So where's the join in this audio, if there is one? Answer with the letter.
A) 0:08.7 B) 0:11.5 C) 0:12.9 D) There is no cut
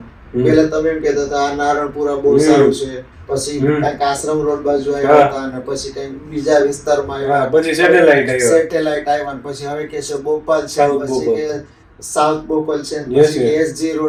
D